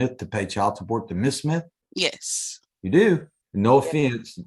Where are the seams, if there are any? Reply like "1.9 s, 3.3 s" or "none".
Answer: 1.8 s, 3.4 s